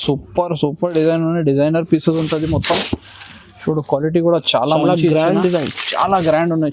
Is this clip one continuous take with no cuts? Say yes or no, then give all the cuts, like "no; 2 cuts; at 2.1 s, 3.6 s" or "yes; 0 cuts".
yes; 0 cuts